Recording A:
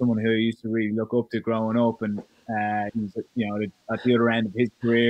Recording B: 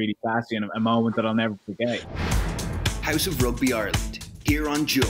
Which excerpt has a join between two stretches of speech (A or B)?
B